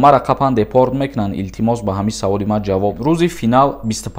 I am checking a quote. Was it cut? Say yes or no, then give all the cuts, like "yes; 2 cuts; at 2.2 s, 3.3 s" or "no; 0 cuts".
yes; 1 cut; at 3.0 s